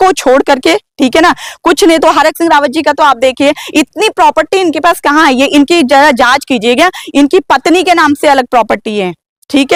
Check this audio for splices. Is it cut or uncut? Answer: uncut